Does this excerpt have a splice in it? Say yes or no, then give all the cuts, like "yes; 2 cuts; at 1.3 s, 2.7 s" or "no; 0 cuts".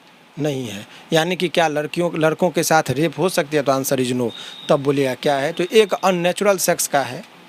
no; 0 cuts